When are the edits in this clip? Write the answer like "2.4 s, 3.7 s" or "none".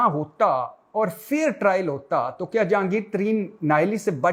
none